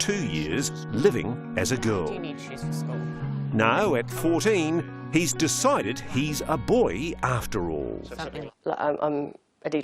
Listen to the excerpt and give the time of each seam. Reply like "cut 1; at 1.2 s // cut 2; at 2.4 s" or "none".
cut 1; at 8.4 s